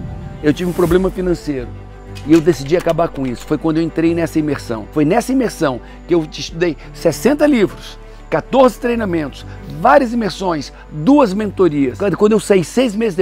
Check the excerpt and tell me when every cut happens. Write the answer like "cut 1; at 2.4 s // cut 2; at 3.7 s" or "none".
none